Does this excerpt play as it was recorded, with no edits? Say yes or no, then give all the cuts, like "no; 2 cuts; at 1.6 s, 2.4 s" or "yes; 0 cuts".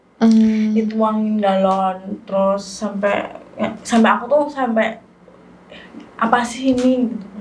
yes; 0 cuts